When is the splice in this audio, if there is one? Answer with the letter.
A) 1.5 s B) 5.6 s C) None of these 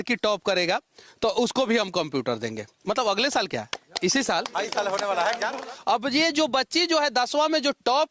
B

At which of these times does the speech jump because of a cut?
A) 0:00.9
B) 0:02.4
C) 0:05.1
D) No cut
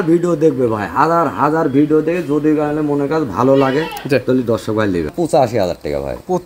C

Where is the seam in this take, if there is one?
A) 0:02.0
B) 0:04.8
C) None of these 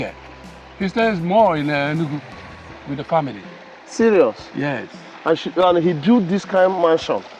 C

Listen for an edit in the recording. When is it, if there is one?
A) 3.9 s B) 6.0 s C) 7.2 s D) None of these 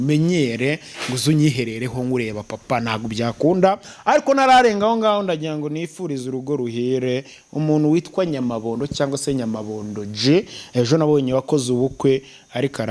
A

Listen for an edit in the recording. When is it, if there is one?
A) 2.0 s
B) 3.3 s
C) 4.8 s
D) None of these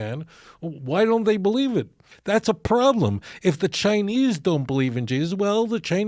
A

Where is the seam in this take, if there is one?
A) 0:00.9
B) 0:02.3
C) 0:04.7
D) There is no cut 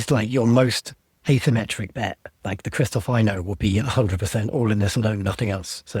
B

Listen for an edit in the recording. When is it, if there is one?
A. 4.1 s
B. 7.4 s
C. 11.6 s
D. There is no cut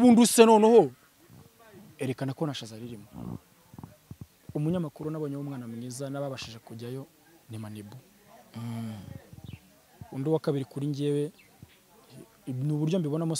A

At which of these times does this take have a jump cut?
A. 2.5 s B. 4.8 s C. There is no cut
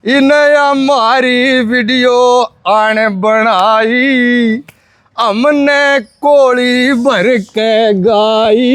C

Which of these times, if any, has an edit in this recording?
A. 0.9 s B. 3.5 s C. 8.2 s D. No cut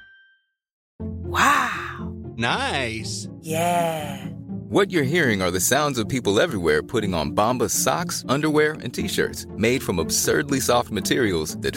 A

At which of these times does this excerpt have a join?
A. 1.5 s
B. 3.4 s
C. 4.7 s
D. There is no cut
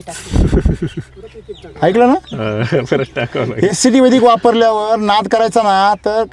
D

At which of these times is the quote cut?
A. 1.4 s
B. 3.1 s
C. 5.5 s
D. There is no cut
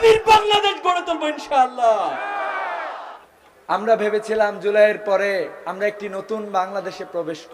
B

